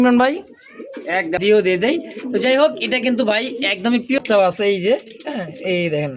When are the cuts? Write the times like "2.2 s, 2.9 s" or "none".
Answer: 1.4 s, 4.2 s